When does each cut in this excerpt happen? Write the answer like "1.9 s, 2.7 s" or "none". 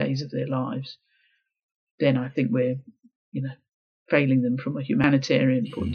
5.0 s